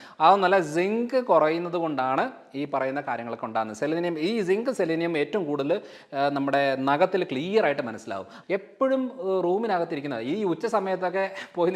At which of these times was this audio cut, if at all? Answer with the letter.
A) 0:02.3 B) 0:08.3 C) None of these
B